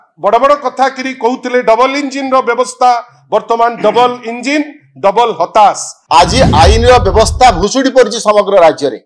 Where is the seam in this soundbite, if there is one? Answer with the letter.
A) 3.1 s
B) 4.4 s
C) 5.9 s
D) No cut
C